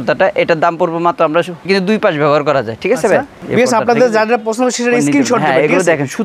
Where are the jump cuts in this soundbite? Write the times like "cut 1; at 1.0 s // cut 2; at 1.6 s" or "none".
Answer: cut 1; at 1.6 s // cut 2; at 3.4 s